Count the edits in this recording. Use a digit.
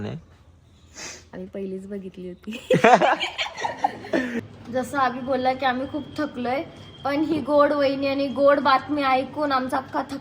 1